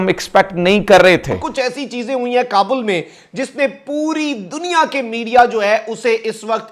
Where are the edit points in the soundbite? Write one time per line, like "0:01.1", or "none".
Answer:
0:01.4